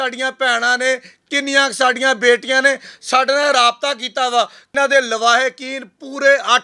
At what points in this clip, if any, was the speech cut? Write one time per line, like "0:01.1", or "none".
0:04.7